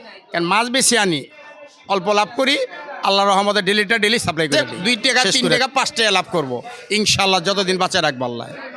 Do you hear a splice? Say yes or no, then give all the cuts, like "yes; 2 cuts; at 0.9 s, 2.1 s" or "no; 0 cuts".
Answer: yes; 1 cut; at 4.5 s